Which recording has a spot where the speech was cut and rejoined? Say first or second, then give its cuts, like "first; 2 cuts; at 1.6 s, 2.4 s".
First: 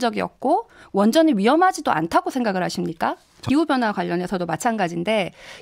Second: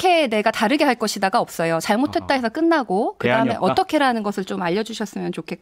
first; 1 cut; at 3.4 s